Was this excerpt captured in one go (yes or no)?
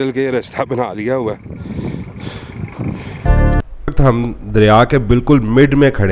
no